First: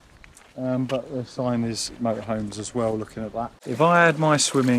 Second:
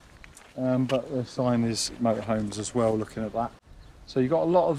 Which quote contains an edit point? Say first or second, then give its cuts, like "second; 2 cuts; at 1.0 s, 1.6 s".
first; 1 cut; at 3.6 s